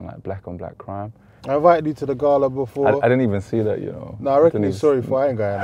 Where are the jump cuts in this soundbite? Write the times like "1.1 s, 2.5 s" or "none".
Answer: 1.3 s